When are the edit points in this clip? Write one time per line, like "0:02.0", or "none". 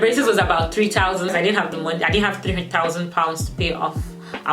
0:01.3